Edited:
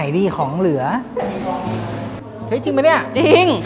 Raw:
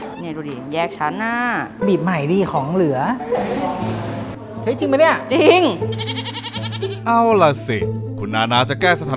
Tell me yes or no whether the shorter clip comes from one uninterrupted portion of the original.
yes